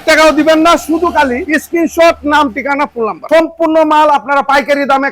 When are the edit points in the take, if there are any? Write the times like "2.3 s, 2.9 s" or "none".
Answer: 3.3 s

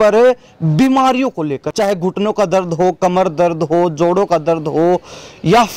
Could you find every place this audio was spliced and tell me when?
1.6 s

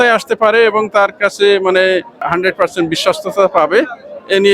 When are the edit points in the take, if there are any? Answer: 2.2 s

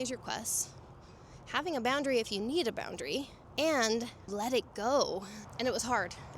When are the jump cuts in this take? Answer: 3.4 s, 4.3 s, 5.4 s

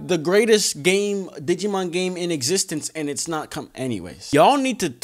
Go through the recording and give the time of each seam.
4.1 s

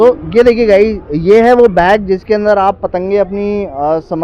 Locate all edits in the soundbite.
none

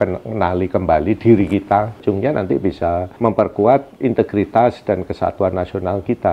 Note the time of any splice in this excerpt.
2.0 s, 3.1 s, 3.9 s

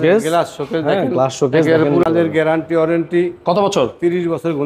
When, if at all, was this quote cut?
2.0 s

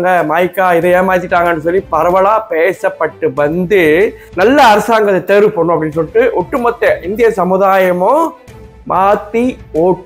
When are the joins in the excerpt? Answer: 4.2 s

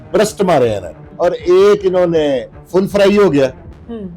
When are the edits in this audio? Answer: 1.1 s

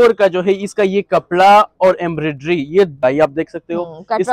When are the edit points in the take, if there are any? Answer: 3.0 s

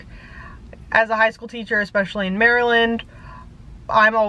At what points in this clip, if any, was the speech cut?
none

